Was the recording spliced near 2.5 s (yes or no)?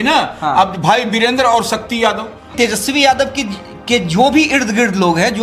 yes